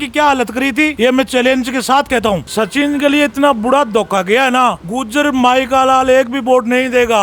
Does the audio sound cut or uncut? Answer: cut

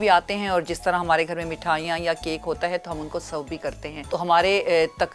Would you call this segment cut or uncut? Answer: cut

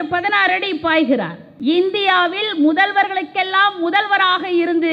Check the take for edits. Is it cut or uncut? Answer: cut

